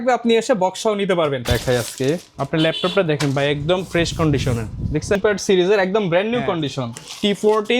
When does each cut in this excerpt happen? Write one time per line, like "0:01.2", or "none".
0:01.5
0:05.2